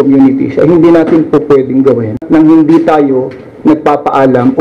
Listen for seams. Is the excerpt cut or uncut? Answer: cut